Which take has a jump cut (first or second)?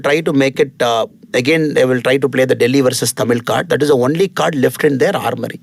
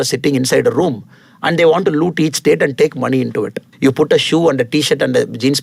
second